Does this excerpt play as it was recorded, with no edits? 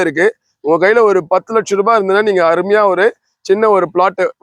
yes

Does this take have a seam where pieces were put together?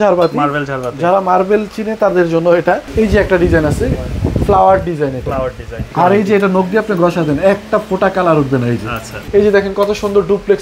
yes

